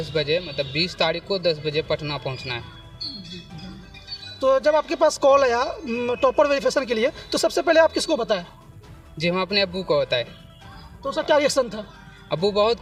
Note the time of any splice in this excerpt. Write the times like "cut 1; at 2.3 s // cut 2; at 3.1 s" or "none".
none

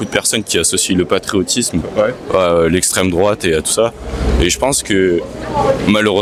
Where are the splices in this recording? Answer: none

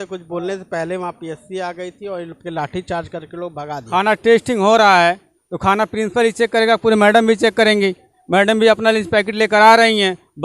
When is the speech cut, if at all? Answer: cut 1; at 3.8 s

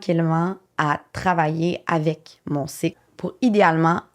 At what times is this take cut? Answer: cut 1; at 3.1 s

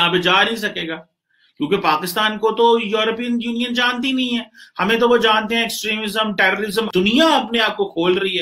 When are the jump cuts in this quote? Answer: cut 1; at 6.9 s

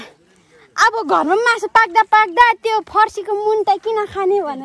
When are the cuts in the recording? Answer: none

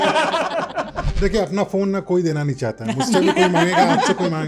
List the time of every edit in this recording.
cut 1; at 1.1 s

